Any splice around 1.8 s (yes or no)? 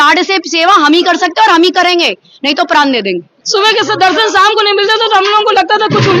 no